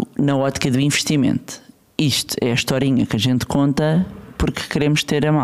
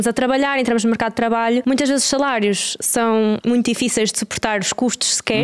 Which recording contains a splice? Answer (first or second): second